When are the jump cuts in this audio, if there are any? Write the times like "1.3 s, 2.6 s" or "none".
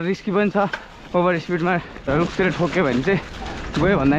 2.1 s